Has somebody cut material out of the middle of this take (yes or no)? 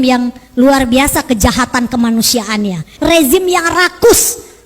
yes